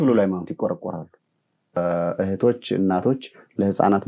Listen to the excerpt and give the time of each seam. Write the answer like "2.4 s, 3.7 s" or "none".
1.8 s

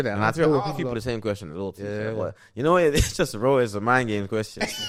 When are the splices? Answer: none

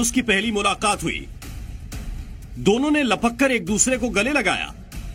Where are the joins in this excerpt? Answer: none

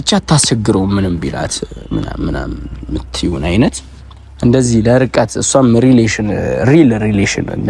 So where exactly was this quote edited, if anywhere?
none

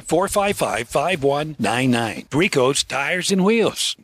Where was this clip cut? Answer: none

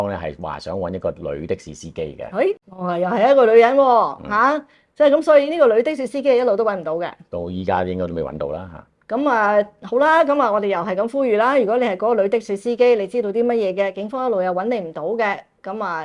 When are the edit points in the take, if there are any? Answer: 2.7 s

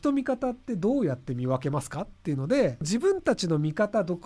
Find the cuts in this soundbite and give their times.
2.9 s

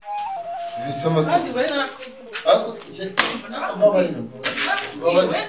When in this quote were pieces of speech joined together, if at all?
1.0 s

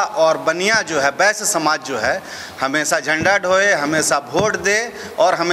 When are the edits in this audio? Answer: none

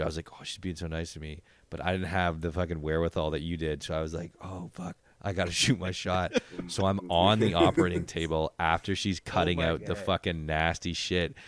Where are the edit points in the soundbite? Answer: none

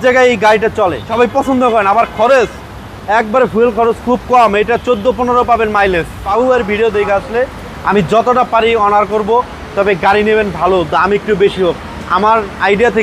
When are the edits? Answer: 1.1 s, 6.3 s

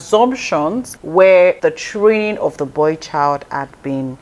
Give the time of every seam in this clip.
0.9 s, 1.6 s

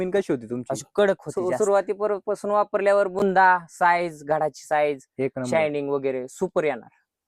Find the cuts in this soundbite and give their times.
1.4 s

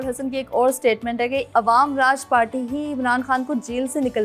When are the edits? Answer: 1.5 s

